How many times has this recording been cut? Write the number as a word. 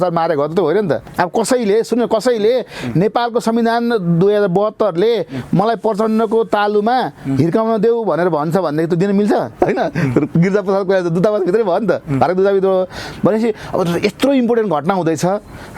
two